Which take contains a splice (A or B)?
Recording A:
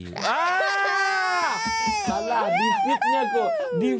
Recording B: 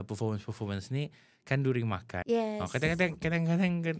B